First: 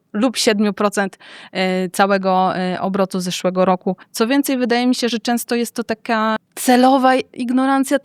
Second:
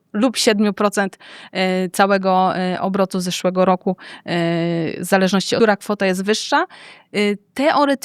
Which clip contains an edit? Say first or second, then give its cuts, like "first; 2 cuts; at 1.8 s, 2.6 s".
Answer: first; 2 cuts; at 4.0 s, 6.4 s